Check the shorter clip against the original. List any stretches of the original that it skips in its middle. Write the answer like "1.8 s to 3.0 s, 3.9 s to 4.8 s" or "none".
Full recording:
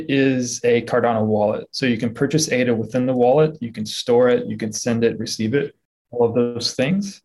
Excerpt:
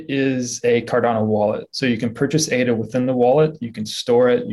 none

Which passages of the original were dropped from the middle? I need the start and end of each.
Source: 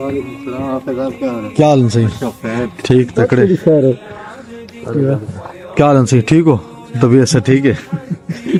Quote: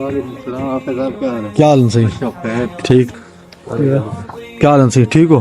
3.1 s to 4.3 s

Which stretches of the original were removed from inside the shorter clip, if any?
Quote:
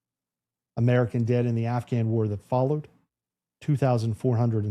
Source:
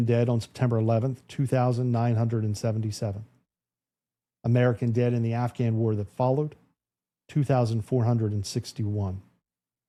none

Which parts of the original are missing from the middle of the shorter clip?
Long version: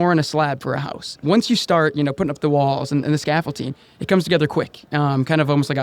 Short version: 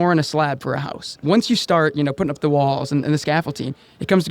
none

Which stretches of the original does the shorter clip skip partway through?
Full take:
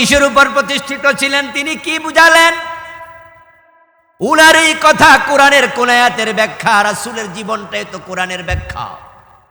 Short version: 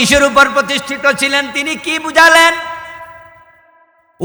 none

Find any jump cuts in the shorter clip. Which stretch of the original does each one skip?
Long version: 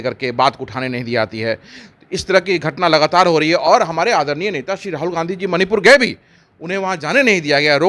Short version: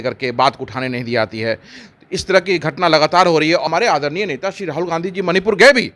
3.6 s to 3.9 s

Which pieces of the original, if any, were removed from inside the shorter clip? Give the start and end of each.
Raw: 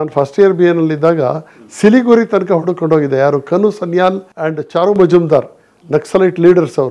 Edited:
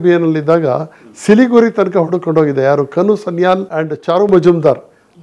4.2 s to 4.4 s

